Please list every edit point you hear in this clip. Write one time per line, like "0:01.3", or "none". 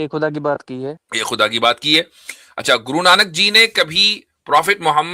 0:01.1